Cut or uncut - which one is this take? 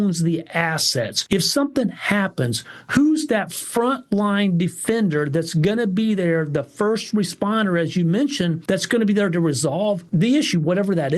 cut